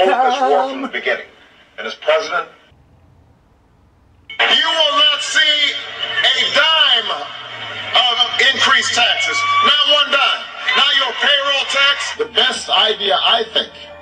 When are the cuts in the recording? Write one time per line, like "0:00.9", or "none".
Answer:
0:02.6